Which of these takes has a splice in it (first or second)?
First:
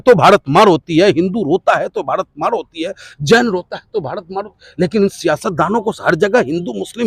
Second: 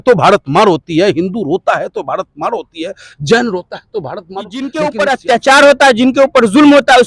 second